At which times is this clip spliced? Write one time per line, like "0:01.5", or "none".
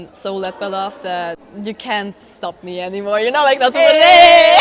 0:01.5

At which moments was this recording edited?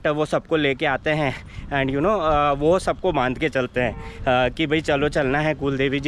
none

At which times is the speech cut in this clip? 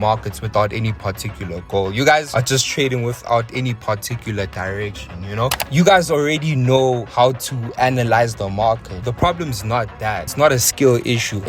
0:05.5

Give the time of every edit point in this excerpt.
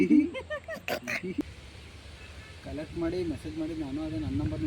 0:01.4

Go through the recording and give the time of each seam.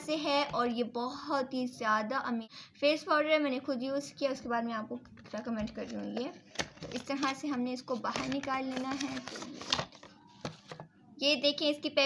0:02.5

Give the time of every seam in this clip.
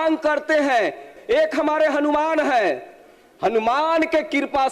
0:01.1

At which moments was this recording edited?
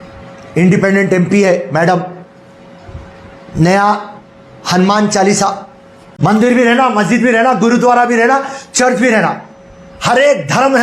0:06.4

